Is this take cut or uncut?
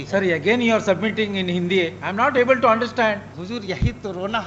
cut